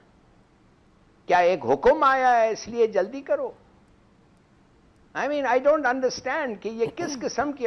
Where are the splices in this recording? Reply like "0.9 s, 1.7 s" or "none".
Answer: none